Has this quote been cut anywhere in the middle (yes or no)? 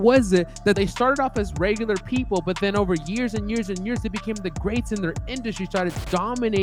no